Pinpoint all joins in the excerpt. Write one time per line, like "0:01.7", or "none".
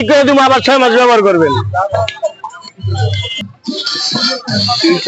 0:03.5